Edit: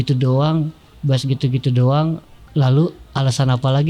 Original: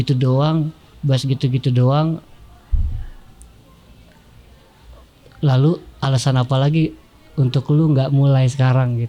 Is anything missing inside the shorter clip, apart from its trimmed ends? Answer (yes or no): yes